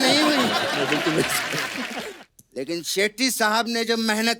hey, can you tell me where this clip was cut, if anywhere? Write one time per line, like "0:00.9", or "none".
0:02.0